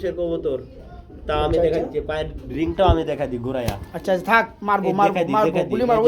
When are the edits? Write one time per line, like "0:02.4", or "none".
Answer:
none